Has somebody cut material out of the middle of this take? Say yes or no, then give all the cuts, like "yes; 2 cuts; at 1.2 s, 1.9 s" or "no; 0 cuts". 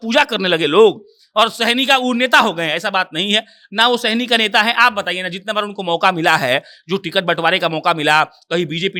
no; 0 cuts